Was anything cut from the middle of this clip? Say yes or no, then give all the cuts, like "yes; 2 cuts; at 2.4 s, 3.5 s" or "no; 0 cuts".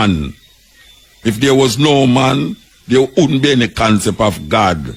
no; 0 cuts